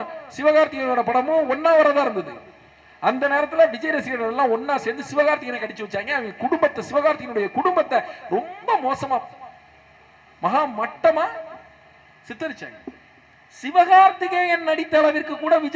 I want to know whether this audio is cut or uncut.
uncut